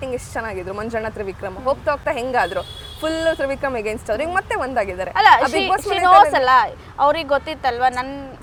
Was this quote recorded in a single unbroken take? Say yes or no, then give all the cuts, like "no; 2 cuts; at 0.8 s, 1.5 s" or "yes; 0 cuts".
yes; 0 cuts